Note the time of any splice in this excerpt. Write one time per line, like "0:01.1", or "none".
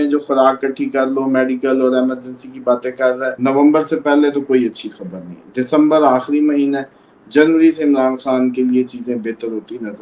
0:03.3